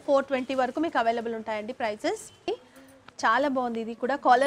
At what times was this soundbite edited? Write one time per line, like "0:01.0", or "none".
0:02.5